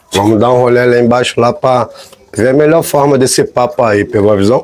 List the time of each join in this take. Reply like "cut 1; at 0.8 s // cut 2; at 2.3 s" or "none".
none